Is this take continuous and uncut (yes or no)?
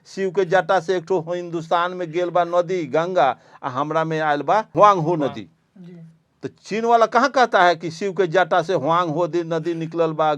no